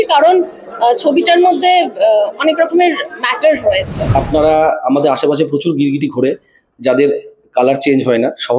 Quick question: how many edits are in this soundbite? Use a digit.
1